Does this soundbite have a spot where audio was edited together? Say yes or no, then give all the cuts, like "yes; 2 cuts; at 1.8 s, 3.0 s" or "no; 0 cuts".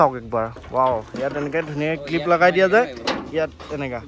no; 0 cuts